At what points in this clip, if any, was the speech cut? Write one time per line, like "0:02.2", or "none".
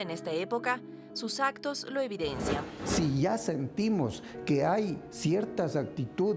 0:02.5